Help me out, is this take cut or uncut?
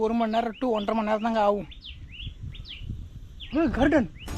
uncut